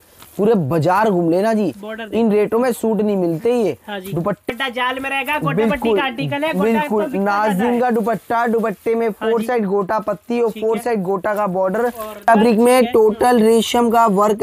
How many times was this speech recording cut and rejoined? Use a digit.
2